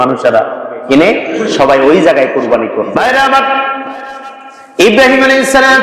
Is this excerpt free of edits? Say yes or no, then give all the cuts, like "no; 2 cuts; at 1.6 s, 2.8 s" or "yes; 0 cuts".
no; 1 cut; at 2.9 s